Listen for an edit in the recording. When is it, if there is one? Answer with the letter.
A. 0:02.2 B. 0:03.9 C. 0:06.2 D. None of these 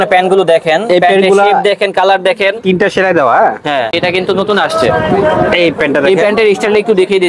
B